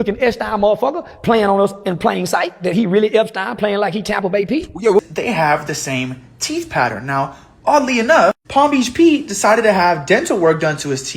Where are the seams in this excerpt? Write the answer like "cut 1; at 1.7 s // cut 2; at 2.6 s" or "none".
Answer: cut 1; at 5.0 s